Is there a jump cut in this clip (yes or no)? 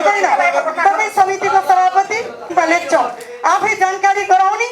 yes